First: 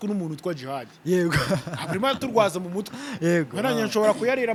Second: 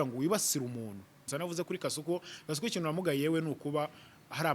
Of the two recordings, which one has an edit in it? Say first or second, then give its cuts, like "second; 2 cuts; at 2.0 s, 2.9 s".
second; 1 cut; at 1.3 s